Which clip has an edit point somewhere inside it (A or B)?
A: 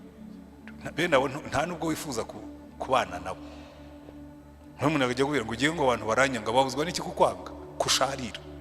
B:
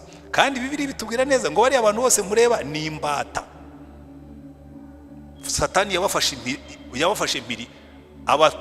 A